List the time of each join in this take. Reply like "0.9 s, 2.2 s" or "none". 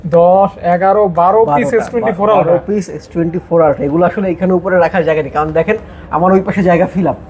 none